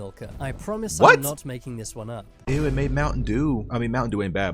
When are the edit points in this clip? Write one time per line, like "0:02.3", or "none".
0:02.4